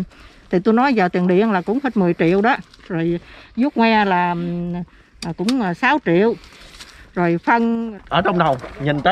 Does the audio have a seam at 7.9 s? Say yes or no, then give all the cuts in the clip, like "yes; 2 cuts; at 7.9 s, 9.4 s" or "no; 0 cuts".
yes; 1 cut; at 7.9 s